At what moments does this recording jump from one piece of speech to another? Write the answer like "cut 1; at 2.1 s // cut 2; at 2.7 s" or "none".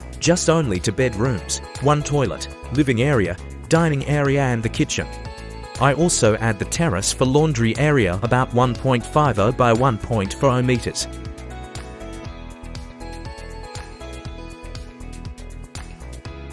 none